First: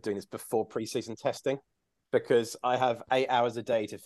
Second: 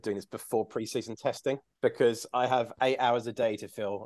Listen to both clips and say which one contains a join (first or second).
second